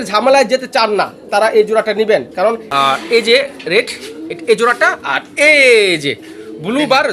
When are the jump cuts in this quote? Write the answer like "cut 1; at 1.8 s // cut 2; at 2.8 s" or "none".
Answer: cut 1; at 2.6 s